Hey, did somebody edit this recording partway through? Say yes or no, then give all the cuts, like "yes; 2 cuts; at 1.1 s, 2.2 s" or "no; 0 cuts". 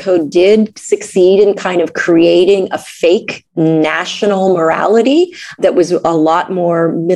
yes; 2 cuts; at 3.4 s, 5.6 s